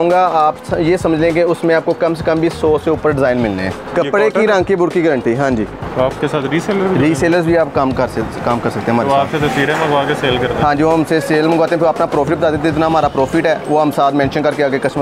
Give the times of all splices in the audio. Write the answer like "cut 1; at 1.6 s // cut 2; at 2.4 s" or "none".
cut 1; at 3.8 s // cut 2; at 5.8 s